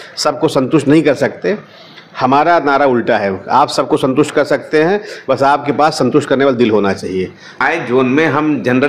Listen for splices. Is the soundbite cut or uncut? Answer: cut